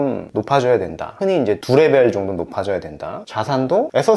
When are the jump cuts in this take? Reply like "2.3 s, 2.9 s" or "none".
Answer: 3.3 s